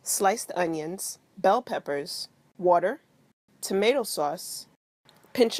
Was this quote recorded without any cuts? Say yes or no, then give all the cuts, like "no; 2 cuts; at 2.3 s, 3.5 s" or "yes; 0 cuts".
yes; 0 cuts